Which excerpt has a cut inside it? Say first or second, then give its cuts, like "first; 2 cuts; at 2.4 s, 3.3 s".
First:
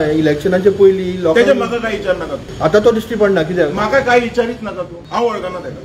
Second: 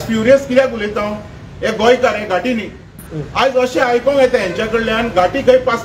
first; 2 cuts; at 2.4 s, 4.9 s